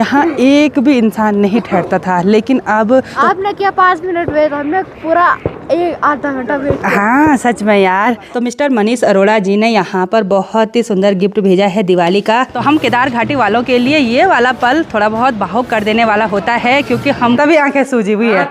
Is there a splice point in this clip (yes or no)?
yes